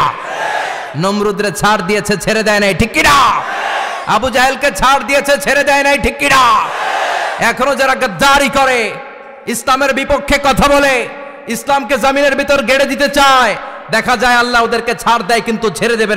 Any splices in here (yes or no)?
no